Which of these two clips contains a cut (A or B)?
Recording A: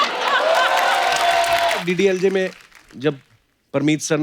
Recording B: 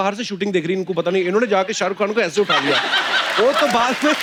A